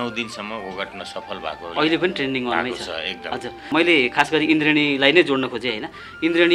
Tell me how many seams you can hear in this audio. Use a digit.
1